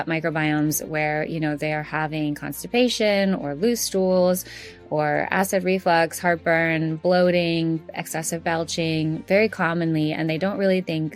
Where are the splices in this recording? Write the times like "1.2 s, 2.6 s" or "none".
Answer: none